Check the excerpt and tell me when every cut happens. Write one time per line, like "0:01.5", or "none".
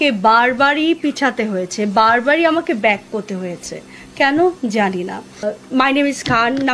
0:05.5